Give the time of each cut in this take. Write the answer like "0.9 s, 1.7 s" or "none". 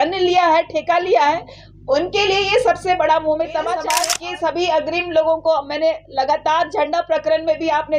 3.9 s